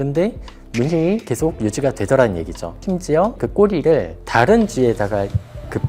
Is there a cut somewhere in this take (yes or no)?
yes